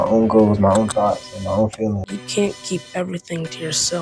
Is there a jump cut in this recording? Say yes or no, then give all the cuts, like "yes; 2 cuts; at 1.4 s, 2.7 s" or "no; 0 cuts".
yes; 1 cut; at 2.1 s